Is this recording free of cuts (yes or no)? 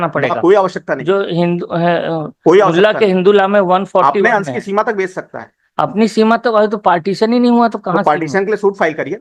yes